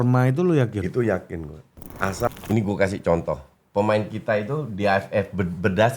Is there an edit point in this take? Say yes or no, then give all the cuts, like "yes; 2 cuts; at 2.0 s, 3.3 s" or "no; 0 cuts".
yes; 1 cut; at 2.3 s